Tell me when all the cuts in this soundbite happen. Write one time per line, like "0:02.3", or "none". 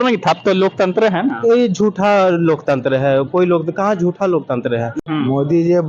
0:05.0